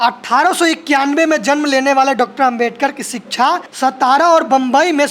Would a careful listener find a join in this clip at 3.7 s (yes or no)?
yes